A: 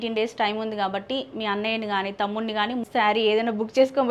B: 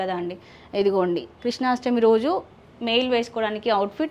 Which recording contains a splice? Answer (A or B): A